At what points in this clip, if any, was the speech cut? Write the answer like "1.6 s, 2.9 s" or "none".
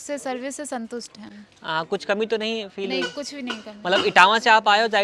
none